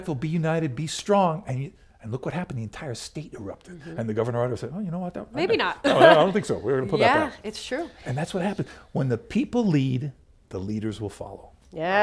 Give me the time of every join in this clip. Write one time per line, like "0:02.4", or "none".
none

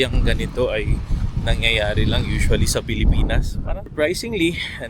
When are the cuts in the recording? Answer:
0:03.9

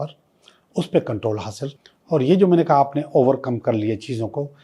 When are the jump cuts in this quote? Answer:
0:01.7

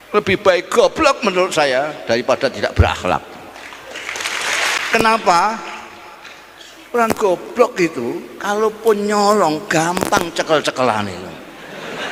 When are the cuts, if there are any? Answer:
0:04.8

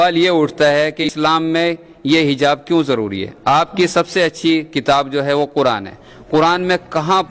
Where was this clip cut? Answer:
0:01.1

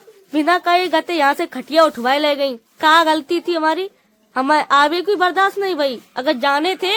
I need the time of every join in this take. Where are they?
none

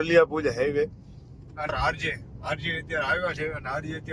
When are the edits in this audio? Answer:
0:01.7

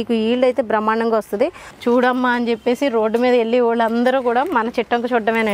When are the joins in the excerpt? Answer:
0:01.6

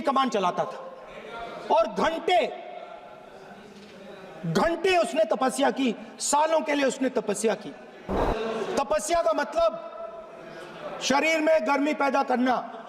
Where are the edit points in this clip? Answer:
0:08.1

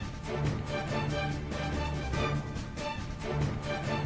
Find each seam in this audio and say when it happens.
0:02.0

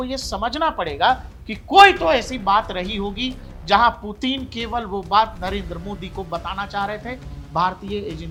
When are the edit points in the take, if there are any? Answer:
none

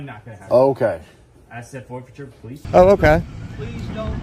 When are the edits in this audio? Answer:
0:02.6

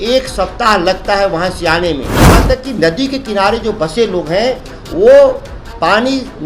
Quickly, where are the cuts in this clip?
0:02.4

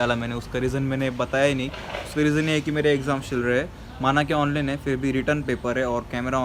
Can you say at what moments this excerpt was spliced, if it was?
none

